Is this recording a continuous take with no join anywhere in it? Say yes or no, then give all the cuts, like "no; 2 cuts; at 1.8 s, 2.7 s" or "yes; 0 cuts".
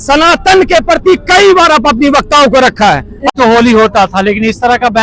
no; 1 cut; at 3.3 s